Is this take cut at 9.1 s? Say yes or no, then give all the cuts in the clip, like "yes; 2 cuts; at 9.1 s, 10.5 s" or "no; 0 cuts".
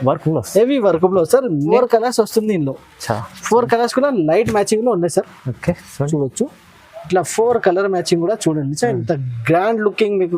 no; 1 cut; at 1.7 s